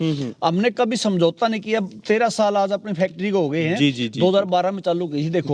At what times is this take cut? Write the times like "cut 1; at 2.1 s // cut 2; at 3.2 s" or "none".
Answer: none